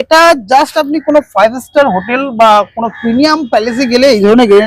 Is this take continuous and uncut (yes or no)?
yes